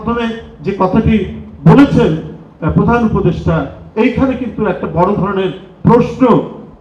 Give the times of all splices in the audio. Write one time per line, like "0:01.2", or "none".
none